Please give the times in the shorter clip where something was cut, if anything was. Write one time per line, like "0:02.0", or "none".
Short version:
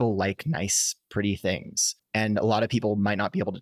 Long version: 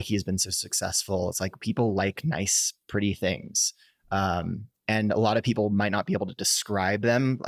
0:01.9